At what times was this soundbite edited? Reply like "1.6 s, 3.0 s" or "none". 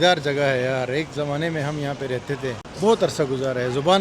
2.7 s